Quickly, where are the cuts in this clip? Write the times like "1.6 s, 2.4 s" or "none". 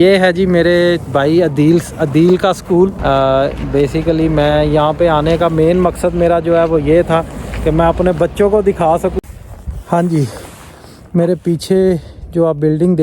3.0 s, 9.2 s